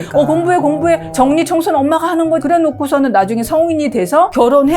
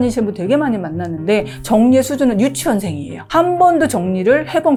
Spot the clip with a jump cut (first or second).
first